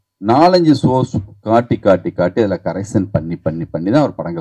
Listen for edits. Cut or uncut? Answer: uncut